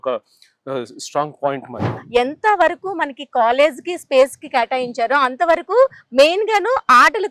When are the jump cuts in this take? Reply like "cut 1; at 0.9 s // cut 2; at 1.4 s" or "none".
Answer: cut 1; at 1.9 s